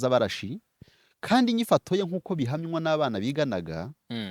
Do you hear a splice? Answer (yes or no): no